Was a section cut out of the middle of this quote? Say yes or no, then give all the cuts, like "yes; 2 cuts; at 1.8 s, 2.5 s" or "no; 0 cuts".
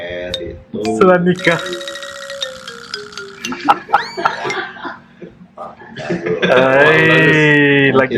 no; 0 cuts